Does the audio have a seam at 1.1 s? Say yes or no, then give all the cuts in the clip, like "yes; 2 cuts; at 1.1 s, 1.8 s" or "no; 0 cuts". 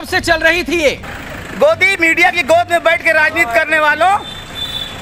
yes; 1 cut; at 1.1 s